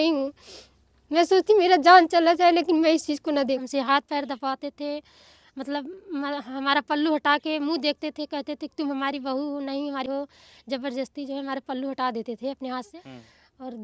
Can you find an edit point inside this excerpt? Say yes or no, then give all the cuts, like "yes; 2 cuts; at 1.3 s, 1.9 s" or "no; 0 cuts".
yes; 3 cuts; at 3.6 s, 10.1 s, 13.0 s